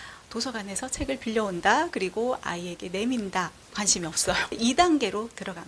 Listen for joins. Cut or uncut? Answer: cut